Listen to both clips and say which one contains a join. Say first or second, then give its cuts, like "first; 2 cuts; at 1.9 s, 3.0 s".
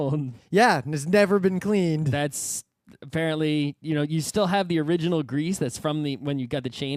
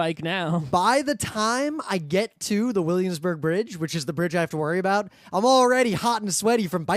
second; 1 cut; at 3.6 s